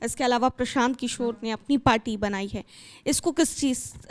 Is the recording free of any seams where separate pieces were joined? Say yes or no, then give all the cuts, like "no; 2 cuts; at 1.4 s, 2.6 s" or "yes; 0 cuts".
yes; 0 cuts